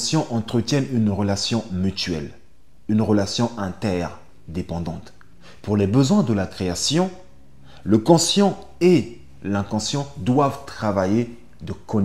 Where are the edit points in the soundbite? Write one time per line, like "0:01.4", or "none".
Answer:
none